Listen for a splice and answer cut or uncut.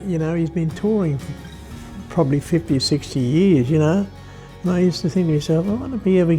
uncut